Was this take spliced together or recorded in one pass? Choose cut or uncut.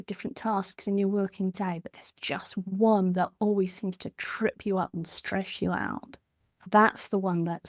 cut